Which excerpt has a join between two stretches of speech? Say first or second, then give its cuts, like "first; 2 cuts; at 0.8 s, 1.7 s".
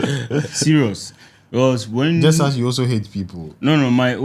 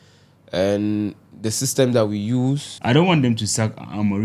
second; 1 cut; at 2.7 s